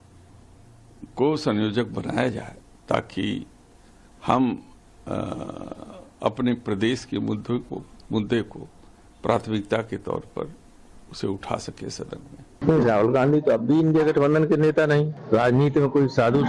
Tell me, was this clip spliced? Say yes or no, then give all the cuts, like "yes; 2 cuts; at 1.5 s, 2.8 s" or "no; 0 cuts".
no; 0 cuts